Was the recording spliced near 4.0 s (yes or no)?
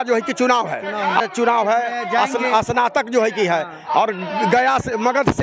no